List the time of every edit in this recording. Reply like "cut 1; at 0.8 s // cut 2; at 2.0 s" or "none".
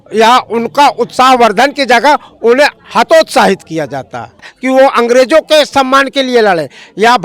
cut 1; at 4.5 s